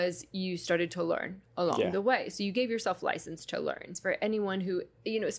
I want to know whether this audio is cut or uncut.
cut